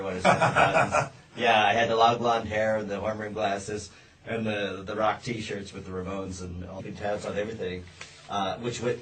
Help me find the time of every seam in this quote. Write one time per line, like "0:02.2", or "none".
none